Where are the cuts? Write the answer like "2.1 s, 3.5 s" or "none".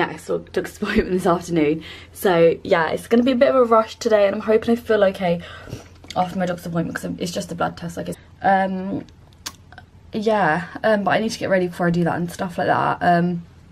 none